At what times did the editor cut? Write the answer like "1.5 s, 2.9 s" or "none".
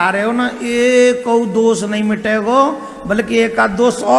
none